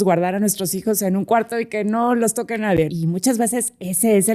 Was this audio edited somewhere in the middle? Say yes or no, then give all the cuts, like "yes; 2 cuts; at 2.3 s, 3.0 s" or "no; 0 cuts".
yes; 1 cut; at 2.9 s